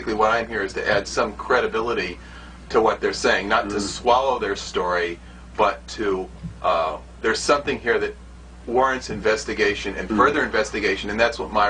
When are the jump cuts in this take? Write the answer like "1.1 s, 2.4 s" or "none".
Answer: none